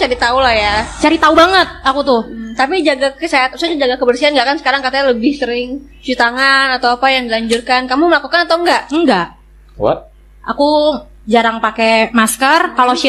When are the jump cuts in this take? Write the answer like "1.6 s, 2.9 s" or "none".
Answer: none